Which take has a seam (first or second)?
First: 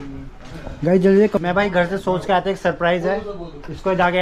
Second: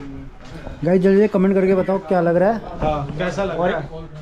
first